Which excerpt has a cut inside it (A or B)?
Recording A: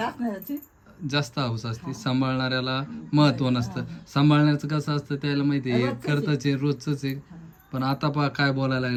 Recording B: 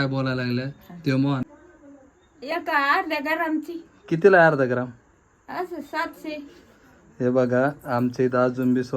B